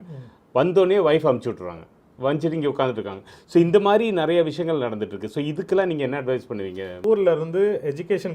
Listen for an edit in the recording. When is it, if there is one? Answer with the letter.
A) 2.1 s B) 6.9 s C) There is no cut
B